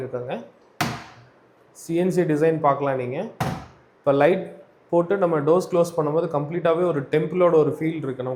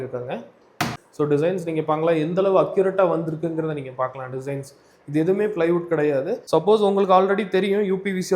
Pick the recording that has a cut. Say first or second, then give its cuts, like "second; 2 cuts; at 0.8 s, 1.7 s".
second; 2 cuts; at 1.0 s, 6.4 s